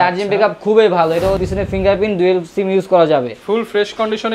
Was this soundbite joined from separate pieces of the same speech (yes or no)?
yes